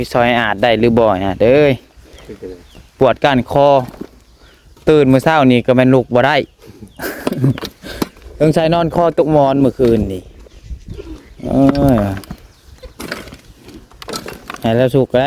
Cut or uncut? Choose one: uncut